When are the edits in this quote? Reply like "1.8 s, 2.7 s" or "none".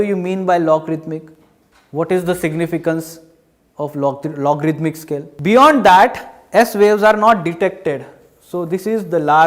5.3 s